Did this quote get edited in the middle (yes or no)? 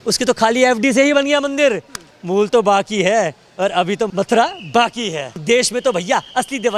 yes